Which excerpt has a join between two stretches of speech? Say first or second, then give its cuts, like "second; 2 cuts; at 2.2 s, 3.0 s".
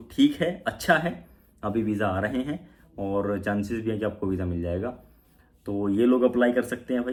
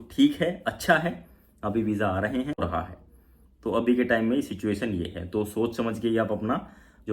second; 1 cut; at 2.6 s